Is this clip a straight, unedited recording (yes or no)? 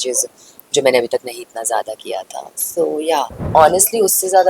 no